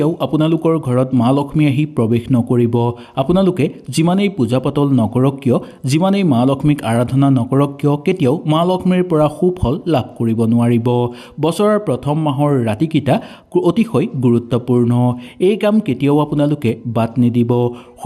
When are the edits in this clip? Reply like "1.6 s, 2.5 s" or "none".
none